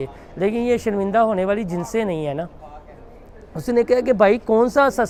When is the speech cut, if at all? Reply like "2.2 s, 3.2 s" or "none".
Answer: none